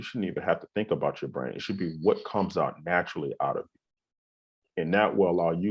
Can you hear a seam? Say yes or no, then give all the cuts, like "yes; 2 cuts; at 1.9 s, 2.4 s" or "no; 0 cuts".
no; 0 cuts